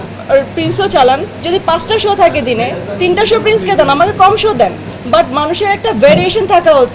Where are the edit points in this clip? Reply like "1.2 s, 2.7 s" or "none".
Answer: 1.3 s